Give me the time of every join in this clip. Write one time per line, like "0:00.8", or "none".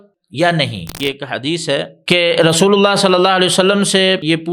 0:01.0